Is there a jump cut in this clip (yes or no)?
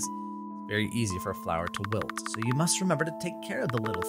no